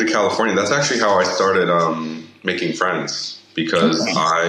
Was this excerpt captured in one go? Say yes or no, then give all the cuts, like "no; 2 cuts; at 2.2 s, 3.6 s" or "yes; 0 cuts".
yes; 0 cuts